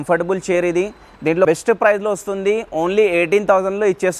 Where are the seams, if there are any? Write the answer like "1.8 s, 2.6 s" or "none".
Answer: 1.5 s